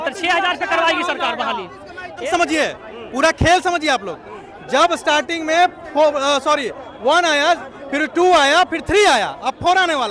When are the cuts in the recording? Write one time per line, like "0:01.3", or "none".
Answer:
0:02.2